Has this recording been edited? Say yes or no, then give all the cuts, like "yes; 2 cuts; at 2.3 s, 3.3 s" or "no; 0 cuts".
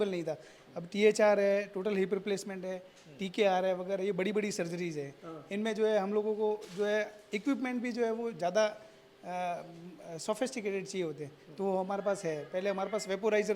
no; 0 cuts